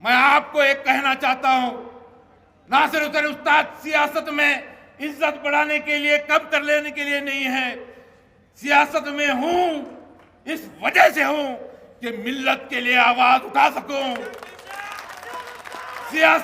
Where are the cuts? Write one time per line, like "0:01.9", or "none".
none